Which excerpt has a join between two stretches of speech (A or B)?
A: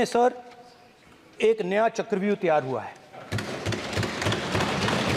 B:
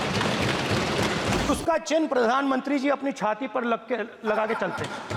B